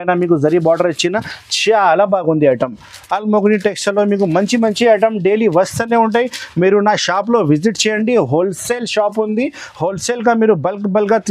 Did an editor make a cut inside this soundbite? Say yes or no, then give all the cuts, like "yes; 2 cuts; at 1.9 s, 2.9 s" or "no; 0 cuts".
no; 0 cuts